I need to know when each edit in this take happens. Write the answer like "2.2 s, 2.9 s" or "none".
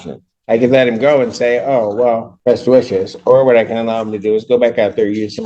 2.3 s